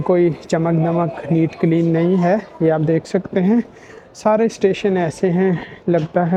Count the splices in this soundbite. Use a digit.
0